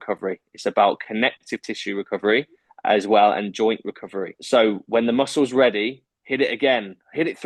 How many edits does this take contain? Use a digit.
0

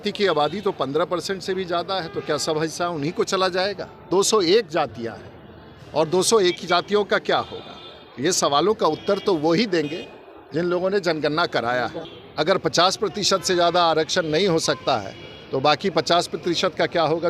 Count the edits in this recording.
2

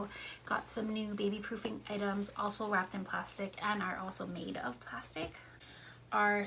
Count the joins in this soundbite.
1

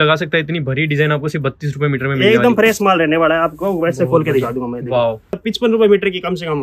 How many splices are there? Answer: 1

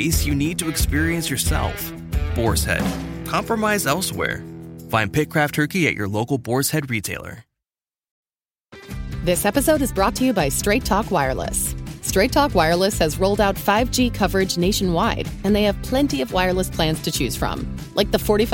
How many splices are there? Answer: 1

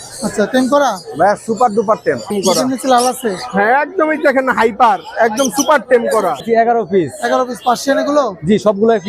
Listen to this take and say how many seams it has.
2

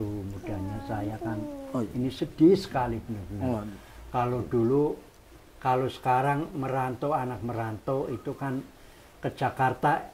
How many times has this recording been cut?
0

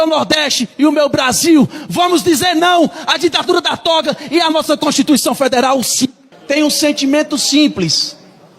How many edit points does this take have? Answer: 1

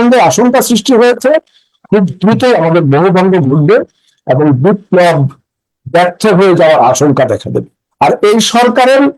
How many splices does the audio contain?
1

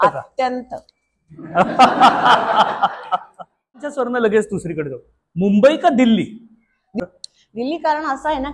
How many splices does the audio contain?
2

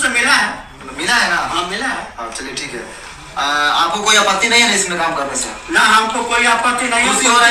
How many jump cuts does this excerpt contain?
0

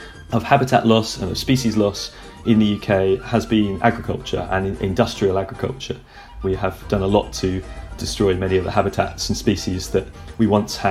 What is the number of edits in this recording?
1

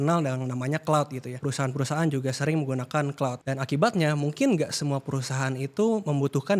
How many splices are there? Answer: 2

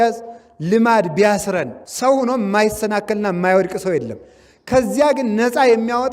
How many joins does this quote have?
1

